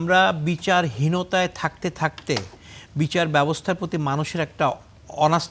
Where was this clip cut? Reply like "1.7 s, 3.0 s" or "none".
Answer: none